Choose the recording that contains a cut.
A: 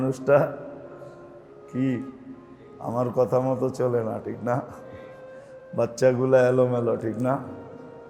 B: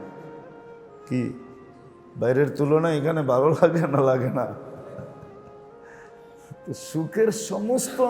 B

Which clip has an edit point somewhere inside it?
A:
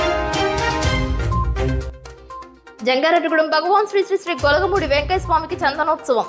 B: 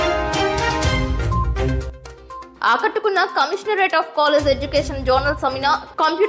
B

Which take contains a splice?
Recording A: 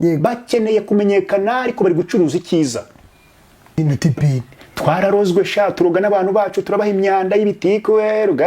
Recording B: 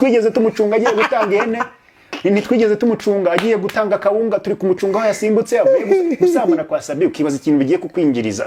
A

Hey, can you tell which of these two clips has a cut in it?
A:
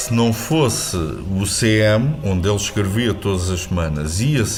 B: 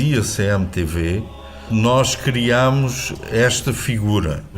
B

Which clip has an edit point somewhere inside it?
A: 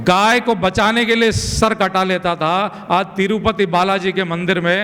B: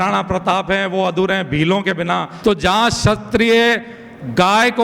B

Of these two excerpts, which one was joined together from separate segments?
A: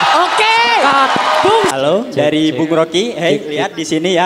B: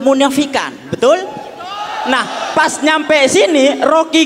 A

